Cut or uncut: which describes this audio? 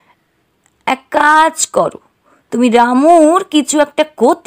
uncut